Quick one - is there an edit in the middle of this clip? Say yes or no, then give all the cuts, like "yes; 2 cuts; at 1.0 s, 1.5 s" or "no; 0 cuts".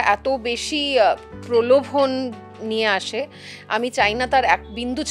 no; 0 cuts